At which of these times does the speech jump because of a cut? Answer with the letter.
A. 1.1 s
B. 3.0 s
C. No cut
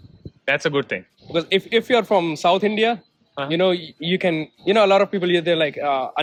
C